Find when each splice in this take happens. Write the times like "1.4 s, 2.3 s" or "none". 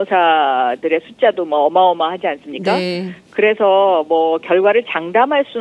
none